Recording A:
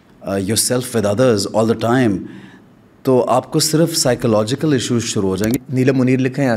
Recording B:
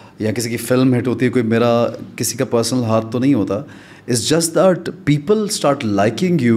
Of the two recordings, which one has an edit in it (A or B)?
A